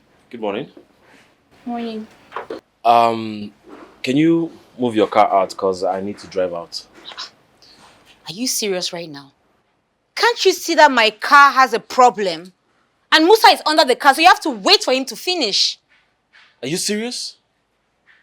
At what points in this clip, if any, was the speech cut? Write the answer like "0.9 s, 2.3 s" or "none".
2.6 s

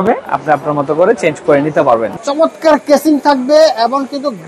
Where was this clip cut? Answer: 2.2 s

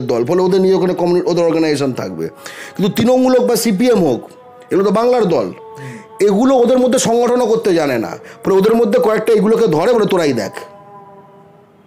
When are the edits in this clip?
none

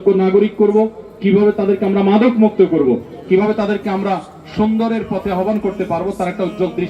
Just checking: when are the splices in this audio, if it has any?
none

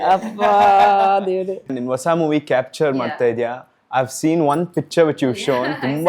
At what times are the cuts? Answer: 1.7 s

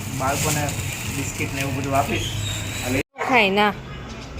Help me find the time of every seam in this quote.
3.0 s

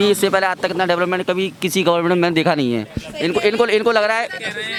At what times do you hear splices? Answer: none

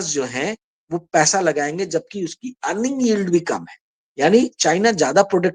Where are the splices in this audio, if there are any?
none

